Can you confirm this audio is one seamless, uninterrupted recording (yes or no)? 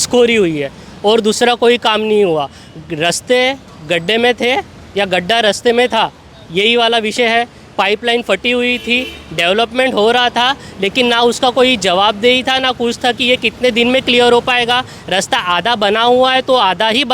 yes